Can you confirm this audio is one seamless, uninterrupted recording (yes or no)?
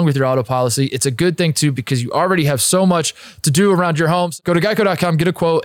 no